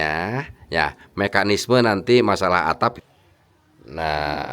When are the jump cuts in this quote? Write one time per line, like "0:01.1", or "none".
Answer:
0:03.0